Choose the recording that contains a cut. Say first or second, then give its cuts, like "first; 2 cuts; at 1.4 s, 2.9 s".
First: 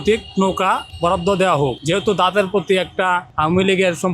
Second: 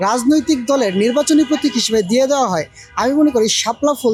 first; 3 cuts; at 0.9 s, 1.8 s, 3.3 s